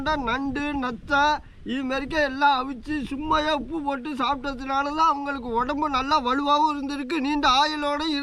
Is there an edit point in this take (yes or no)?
no